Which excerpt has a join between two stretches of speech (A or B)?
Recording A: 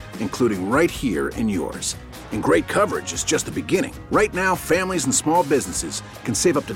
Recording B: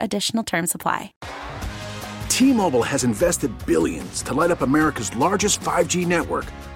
B